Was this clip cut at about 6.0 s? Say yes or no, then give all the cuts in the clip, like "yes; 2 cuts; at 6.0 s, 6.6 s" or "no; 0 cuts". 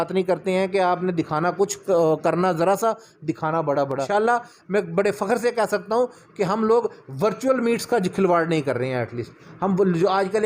no; 1 cut; at 4.1 s